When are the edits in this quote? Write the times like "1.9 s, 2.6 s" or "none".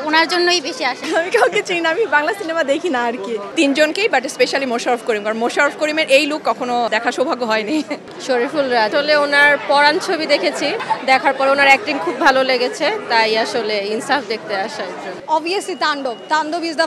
1.0 s, 3.5 s, 6.9 s, 8.1 s, 8.9 s, 10.8 s, 15.2 s